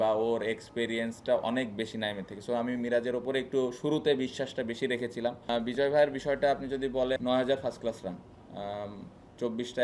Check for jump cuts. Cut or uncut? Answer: cut